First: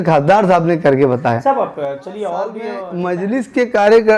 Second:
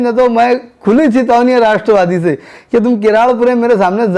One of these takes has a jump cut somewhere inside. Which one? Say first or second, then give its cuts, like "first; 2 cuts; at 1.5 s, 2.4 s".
first; 1 cut; at 2.9 s